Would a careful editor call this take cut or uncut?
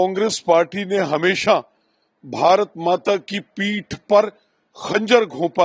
uncut